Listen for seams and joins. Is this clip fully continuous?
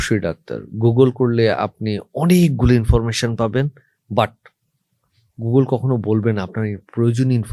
yes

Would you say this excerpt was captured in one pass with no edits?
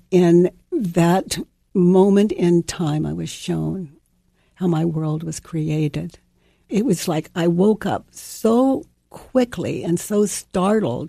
no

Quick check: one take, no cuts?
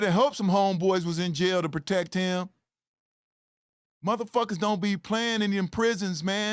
yes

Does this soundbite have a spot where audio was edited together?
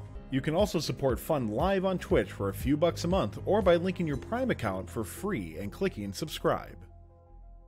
yes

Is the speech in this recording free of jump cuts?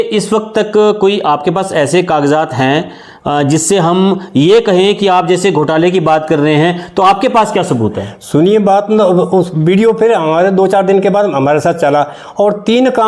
yes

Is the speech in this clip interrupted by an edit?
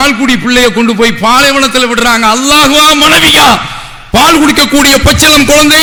no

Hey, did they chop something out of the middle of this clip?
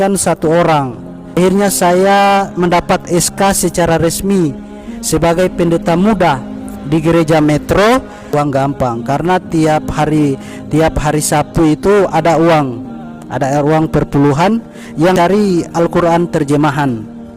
yes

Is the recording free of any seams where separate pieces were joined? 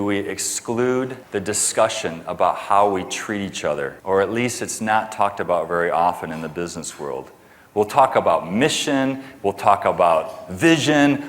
no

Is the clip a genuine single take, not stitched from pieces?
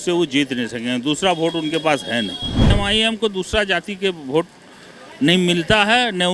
no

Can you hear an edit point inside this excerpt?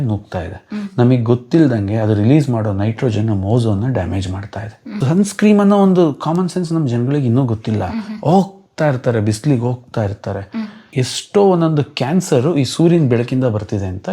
yes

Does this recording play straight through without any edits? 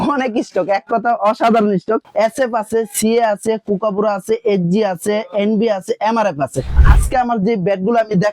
no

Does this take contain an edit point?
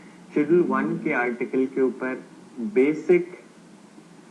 yes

